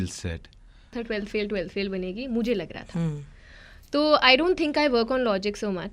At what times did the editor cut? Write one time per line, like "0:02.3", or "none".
0:00.9